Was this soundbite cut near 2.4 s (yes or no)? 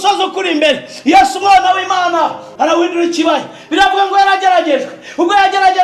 yes